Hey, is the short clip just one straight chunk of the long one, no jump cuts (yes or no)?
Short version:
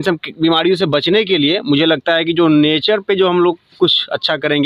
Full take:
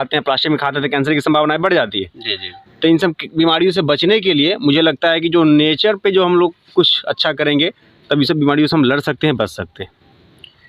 yes